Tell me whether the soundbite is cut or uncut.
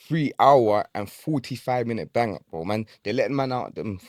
uncut